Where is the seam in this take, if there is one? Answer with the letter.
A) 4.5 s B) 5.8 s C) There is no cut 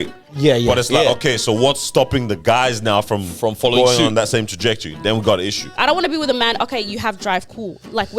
B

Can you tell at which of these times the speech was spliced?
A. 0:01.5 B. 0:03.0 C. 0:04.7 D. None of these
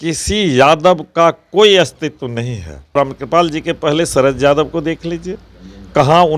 B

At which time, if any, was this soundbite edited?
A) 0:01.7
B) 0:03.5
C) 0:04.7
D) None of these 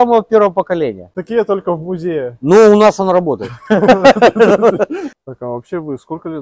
C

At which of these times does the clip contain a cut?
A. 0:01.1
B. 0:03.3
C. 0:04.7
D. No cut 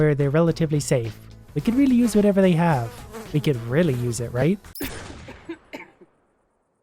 C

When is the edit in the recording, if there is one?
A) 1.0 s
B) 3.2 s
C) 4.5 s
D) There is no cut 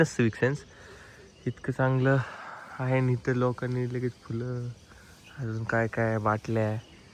D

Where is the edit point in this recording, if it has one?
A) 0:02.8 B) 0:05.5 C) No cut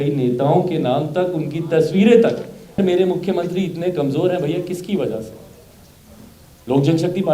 A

